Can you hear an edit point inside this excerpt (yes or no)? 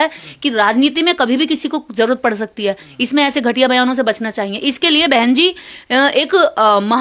no